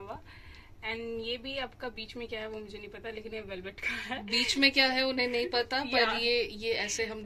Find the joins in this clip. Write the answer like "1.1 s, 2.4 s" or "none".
none